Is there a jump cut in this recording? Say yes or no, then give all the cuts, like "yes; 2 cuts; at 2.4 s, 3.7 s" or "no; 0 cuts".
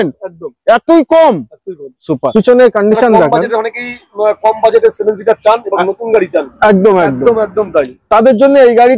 yes; 1 cut; at 2.2 s